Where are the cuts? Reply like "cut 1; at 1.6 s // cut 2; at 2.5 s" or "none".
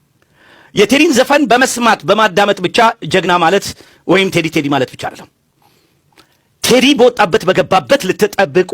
none